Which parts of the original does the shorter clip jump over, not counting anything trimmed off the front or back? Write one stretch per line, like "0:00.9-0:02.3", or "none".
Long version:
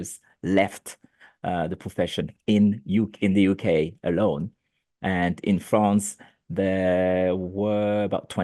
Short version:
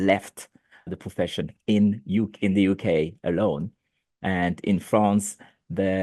0:01.4-0:01.7